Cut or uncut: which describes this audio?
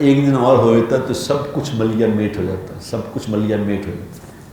uncut